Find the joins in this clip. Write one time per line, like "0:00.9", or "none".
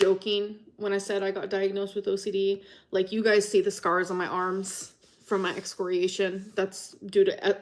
none